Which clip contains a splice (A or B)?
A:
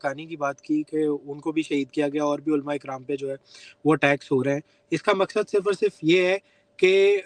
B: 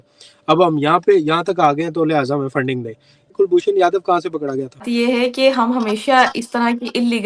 B